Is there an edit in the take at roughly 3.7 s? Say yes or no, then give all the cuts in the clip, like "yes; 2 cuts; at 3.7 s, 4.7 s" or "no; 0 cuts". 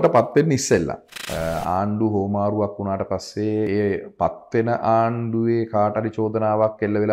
yes; 2 cuts; at 1.0 s, 3.7 s